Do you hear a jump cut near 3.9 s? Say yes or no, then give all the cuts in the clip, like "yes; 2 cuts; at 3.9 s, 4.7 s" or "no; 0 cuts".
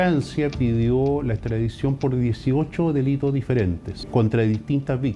yes; 1 cut; at 3.9 s